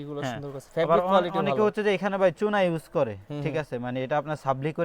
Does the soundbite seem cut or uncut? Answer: uncut